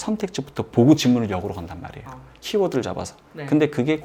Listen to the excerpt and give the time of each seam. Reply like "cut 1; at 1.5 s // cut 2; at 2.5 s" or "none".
none